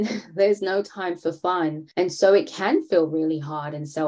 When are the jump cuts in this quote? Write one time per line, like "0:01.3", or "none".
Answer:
0:01.8

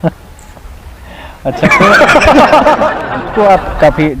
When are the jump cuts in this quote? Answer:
0:03.2

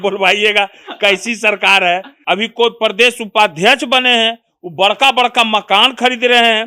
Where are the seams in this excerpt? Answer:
0:02.1

